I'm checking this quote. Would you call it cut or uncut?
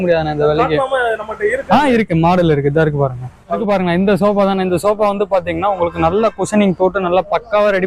uncut